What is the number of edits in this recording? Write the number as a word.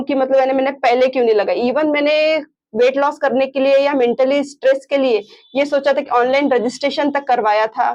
zero